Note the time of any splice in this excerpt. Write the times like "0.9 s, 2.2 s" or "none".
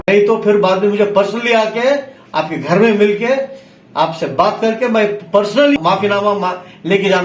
5.8 s